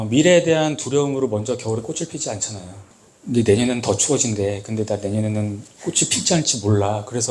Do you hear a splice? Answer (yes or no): yes